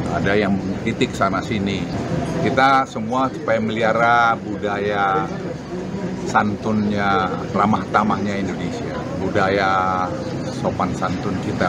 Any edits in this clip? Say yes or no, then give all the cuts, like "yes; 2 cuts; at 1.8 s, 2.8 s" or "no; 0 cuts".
no; 0 cuts